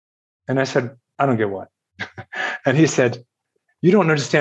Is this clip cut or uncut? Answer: uncut